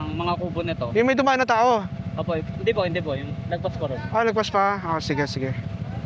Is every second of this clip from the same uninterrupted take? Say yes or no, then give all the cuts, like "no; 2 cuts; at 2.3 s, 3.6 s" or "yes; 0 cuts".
yes; 0 cuts